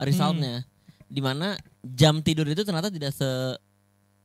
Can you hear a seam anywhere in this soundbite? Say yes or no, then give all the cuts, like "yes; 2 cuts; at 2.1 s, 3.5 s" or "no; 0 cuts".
no; 0 cuts